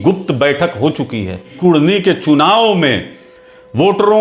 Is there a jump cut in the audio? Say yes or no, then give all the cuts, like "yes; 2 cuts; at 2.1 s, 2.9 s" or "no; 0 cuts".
yes; 1 cut; at 1.5 s